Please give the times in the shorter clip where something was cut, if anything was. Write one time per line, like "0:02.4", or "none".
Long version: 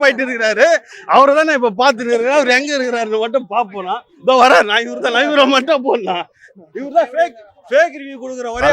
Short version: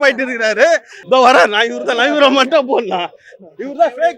0:00.9